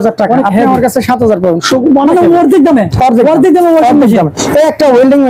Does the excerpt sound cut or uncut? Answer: uncut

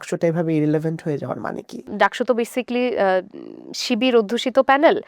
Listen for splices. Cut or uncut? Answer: cut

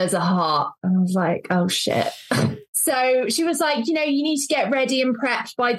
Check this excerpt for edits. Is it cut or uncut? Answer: cut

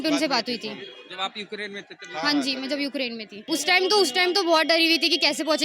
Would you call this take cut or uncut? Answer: cut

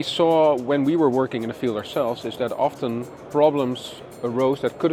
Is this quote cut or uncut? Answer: uncut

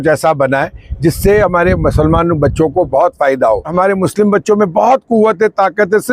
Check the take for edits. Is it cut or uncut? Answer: cut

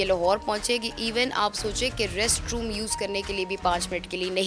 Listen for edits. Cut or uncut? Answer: uncut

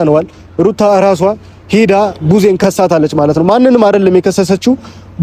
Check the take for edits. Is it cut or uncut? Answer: cut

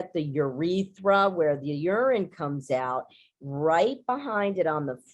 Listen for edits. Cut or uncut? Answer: uncut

